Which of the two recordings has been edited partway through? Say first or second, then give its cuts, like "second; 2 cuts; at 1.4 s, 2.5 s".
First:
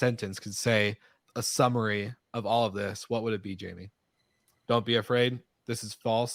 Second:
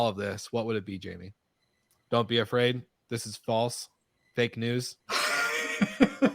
second; 1 cut; at 5.0 s